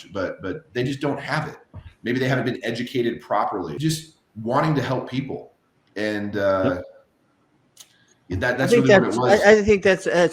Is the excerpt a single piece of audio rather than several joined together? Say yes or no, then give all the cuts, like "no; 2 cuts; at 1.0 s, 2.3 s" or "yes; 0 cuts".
no; 1 cut; at 3.7 s